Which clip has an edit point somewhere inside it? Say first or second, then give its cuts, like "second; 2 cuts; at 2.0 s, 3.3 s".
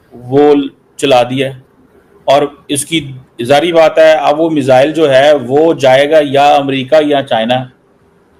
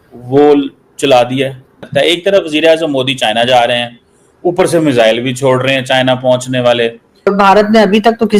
second; 2 cuts; at 1.9 s, 7.3 s